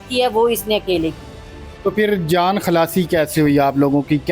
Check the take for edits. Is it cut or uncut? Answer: uncut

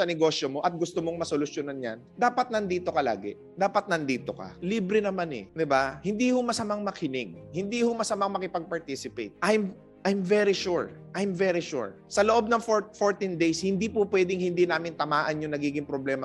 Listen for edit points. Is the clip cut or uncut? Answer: uncut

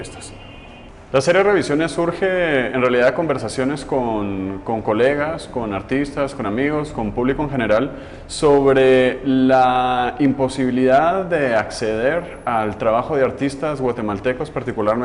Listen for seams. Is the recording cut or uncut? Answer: uncut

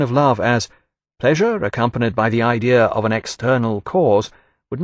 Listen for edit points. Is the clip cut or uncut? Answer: uncut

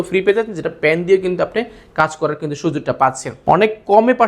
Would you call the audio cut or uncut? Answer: cut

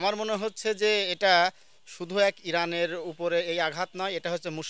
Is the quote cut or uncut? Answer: uncut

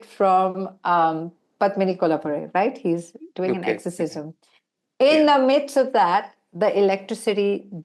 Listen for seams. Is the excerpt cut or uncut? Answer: uncut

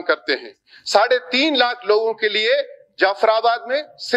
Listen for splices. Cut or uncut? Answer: uncut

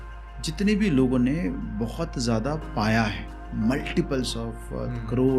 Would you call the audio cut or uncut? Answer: uncut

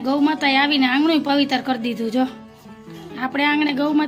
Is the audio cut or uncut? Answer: uncut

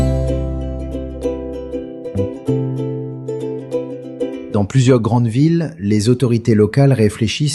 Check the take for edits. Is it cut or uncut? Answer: cut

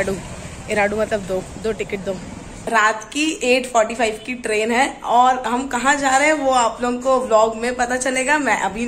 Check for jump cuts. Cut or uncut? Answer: cut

